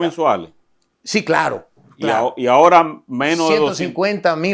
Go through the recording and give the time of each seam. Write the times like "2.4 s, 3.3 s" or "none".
none

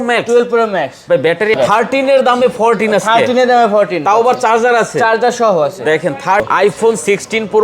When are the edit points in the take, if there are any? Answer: 1.5 s, 6.5 s

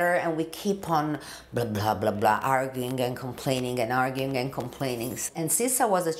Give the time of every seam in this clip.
5.2 s

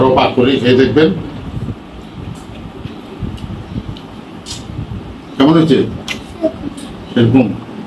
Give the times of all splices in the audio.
none

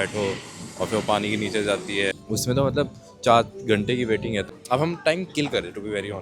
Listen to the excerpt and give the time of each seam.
2.1 s, 4.5 s

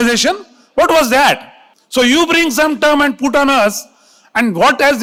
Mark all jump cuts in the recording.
none

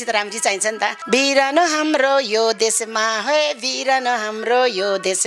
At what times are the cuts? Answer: 1.0 s

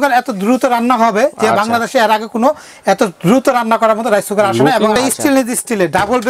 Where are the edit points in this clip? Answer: 5.0 s

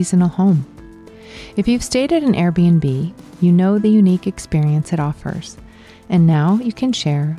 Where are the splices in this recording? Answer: none

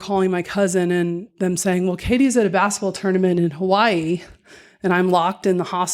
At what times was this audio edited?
1.3 s

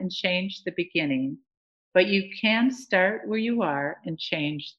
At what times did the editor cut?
none

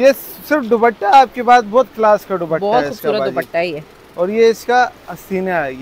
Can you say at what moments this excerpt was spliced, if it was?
none

